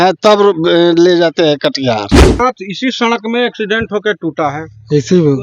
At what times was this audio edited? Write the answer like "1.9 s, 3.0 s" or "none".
2.4 s

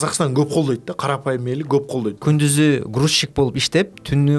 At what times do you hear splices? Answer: 2.2 s

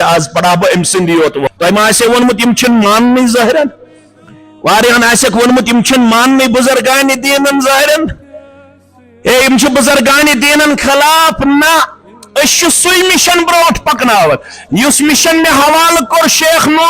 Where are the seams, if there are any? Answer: 1.4 s

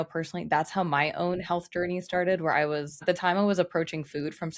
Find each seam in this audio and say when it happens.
3.0 s

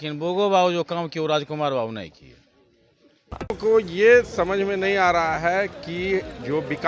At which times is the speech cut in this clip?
3.5 s

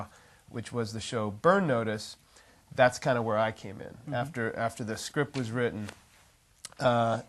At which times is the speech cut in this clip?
3.4 s

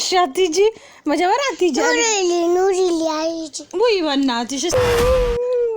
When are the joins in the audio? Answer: 4.7 s

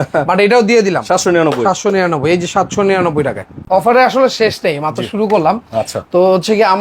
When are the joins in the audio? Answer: 3.5 s

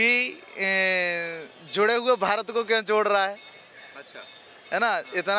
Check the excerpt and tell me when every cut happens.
none

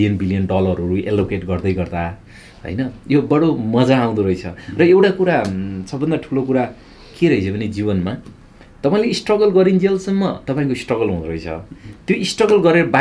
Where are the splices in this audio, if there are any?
none

